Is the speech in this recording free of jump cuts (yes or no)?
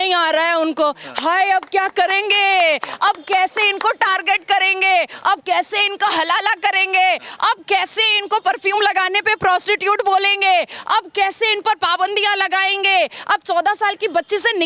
yes